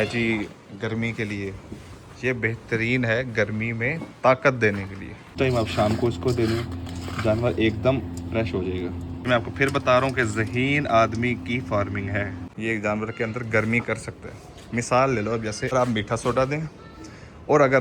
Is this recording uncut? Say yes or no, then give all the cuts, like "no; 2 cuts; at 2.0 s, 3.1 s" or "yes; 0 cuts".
no; 4 cuts; at 5.3 s, 9.3 s, 12.4 s, 15.7 s